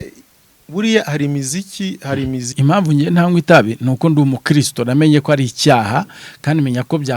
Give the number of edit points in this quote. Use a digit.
1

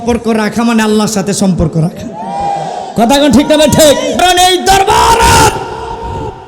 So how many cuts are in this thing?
1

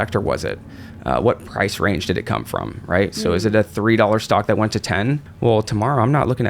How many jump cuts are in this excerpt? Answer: 1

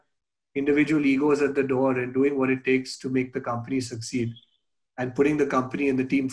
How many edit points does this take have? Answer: 0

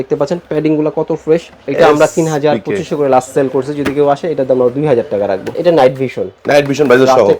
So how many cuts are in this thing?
2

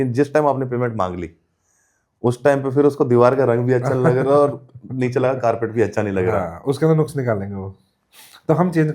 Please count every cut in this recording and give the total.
0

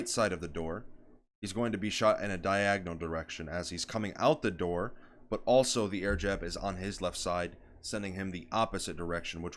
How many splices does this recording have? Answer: 0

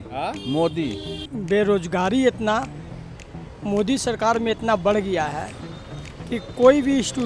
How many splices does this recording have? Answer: 1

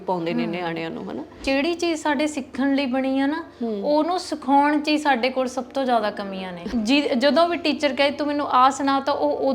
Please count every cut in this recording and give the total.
2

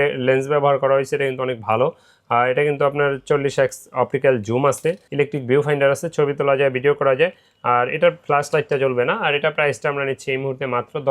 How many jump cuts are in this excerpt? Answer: 1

